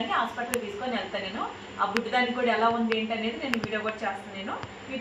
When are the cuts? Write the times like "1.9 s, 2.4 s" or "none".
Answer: none